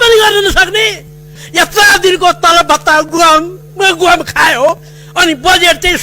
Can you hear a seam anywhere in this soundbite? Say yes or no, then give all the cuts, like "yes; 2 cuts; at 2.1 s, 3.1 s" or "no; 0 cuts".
yes; 1 cut; at 1.4 s